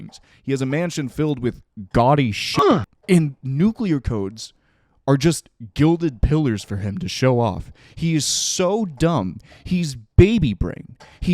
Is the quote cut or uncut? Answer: cut